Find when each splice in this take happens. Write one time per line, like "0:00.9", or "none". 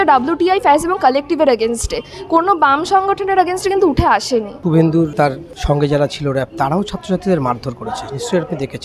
none